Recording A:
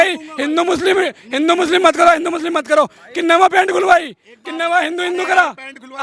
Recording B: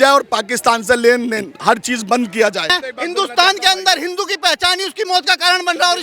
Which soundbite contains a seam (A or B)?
B